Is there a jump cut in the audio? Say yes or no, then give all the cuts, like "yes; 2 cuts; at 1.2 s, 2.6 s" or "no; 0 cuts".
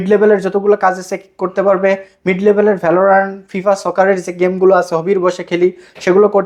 no; 0 cuts